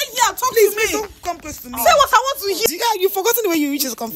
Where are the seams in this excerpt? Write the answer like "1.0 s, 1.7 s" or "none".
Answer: 2.7 s